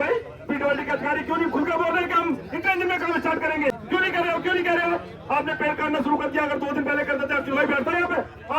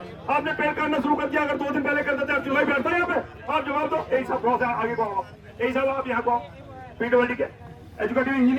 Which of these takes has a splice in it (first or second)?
first